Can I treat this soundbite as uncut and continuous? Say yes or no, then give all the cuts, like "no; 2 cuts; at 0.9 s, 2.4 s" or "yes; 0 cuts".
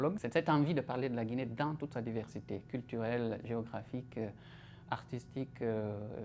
yes; 0 cuts